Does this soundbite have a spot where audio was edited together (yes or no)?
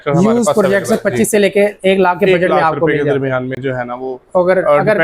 no